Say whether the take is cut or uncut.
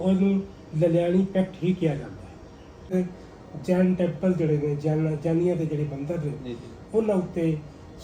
cut